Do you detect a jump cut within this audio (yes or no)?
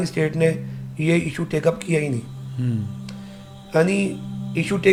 no